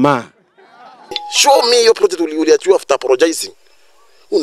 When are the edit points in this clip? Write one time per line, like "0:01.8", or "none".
0:01.3